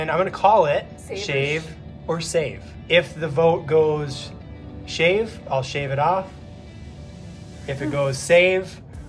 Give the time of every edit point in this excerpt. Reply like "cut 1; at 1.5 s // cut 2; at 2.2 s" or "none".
cut 1; at 1.0 s // cut 2; at 2.7 s